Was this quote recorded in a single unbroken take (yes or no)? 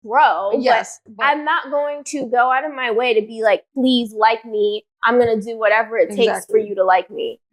yes